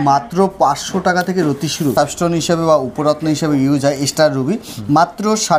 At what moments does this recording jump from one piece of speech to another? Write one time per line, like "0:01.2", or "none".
0:01.9